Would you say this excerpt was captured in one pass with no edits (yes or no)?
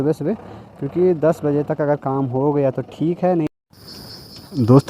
no